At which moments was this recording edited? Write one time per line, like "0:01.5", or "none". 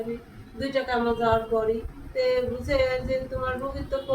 0:02.0